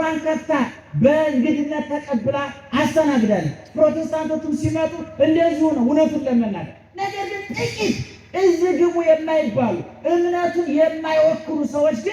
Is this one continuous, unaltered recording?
yes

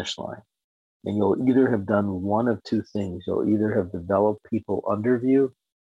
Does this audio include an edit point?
no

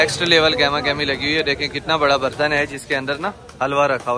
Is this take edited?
no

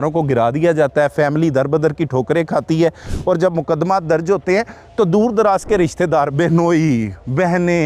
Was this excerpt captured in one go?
yes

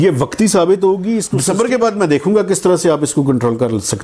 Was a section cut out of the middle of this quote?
yes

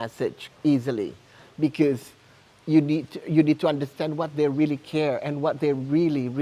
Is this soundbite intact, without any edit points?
yes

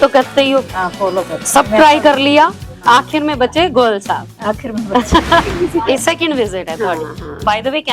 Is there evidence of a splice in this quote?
yes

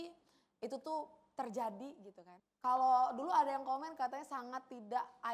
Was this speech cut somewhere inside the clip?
yes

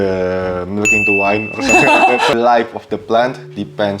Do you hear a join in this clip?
yes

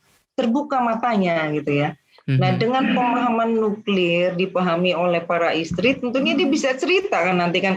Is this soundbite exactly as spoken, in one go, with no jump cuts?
yes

